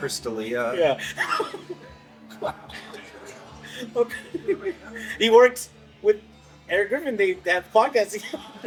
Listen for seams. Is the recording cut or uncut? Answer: uncut